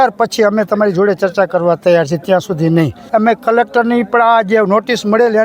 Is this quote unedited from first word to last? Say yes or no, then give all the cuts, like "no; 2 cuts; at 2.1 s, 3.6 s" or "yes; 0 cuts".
no; 1 cut; at 3.0 s